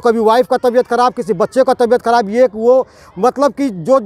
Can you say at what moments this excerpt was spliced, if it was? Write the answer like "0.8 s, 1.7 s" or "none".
none